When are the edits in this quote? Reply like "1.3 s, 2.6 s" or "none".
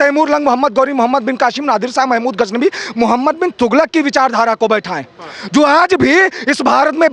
none

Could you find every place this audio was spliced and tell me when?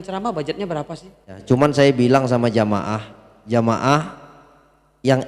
1.4 s

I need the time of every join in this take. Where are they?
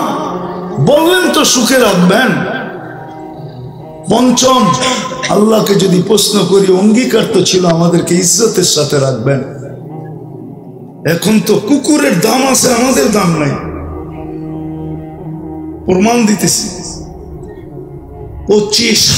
9.6 s, 11.0 s, 13.6 s, 15.8 s

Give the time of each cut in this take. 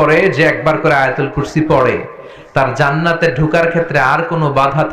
none

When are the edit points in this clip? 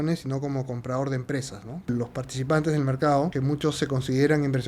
1.9 s, 3.3 s

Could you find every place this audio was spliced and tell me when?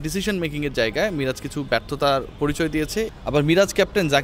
3.1 s

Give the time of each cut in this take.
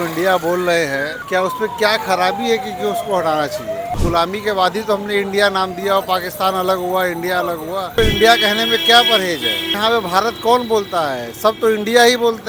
1.2 s, 4.0 s, 7.9 s, 9.8 s

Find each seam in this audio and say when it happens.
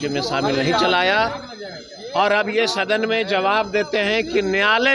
none

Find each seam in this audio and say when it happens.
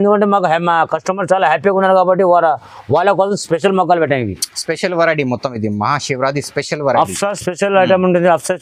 none

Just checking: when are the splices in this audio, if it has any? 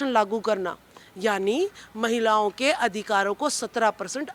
none

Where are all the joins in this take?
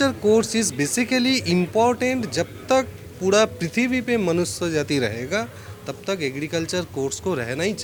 none

